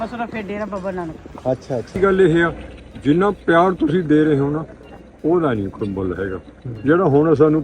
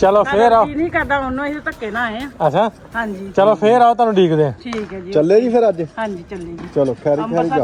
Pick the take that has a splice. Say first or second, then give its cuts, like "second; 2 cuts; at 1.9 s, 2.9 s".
first; 1 cut; at 2.0 s